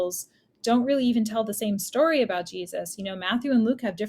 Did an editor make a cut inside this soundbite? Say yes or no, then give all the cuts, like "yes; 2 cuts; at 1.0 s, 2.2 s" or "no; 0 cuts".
no; 0 cuts